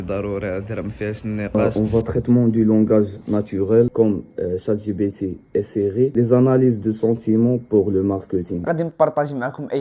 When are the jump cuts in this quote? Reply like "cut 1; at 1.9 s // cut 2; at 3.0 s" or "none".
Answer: cut 1; at 1.5 s // cut 2; at 3.9 s // cut 3; at 8.6 s